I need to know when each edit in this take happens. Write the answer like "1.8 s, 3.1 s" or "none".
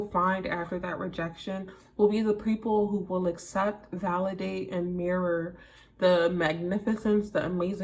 none